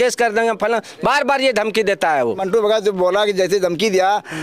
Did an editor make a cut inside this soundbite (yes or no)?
yes